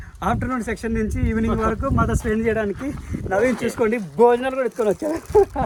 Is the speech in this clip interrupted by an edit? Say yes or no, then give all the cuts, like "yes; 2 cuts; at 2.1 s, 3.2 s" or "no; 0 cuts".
no; 0 cuts